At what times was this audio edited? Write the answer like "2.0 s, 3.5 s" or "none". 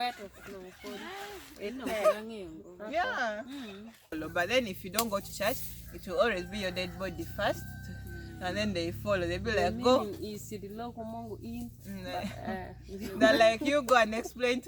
4.0 s